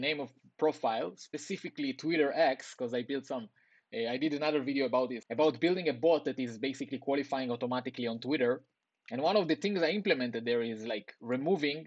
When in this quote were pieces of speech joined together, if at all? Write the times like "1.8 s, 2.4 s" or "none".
5.2 s